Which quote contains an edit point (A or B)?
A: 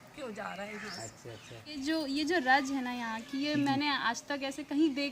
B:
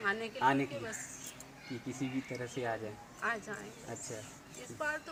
A